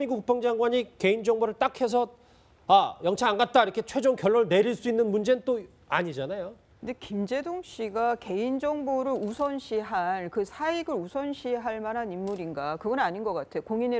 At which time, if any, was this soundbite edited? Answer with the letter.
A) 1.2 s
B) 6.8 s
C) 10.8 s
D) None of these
D